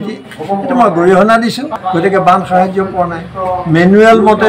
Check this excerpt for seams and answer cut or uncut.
cut